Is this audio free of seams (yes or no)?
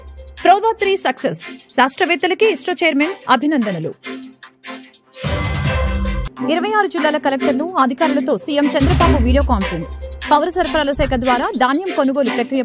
yes